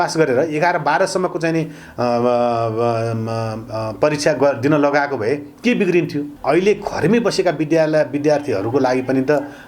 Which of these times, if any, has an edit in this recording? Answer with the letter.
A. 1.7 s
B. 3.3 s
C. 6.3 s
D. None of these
C